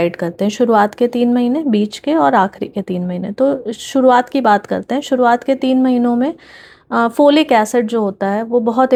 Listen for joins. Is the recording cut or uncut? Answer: uncut